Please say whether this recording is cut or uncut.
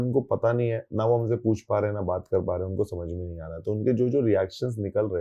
uncut